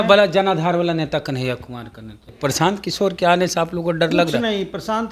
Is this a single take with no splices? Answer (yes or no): no